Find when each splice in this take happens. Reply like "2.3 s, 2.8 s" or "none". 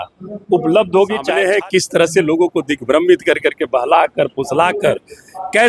1.3 s